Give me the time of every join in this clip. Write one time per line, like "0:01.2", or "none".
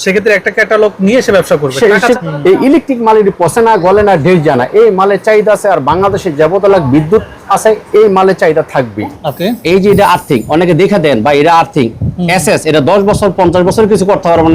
0:02.2
0:09.2